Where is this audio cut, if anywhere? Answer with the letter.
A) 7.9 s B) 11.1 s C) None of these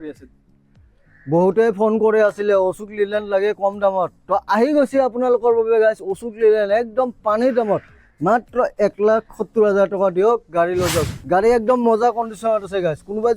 B